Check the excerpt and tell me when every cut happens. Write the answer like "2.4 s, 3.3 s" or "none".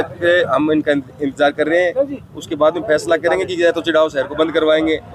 none